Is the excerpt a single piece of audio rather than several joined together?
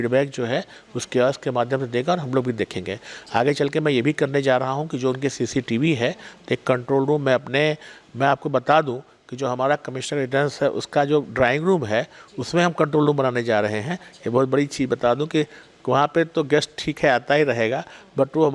yes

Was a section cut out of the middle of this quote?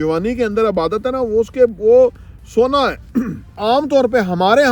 yes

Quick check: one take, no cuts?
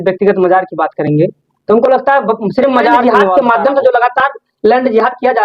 no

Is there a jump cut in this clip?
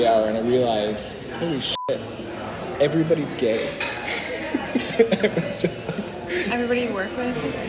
no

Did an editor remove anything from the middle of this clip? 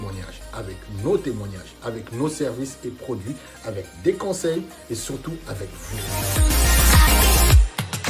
yes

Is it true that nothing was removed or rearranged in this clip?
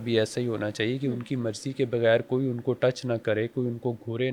yes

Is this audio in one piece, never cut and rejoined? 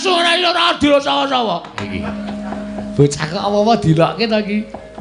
no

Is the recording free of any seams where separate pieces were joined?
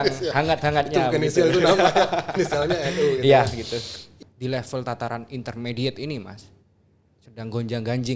no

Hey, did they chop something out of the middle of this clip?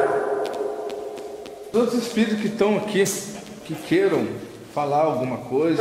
yes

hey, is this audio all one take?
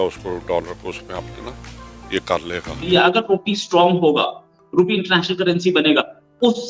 no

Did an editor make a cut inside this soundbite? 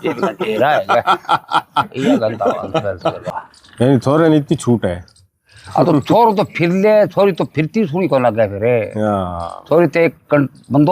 yes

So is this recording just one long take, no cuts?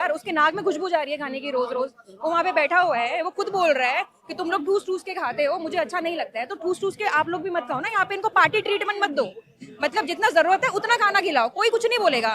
yes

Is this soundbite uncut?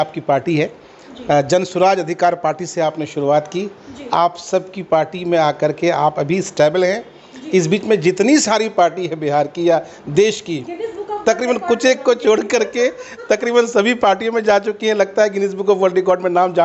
yes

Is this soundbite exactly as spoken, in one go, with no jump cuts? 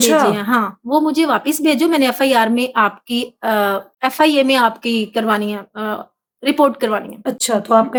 yes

